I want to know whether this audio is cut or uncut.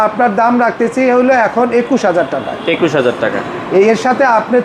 uncut